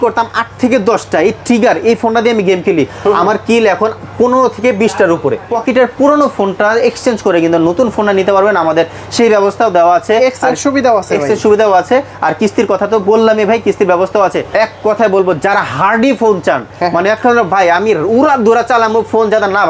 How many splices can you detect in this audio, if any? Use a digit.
2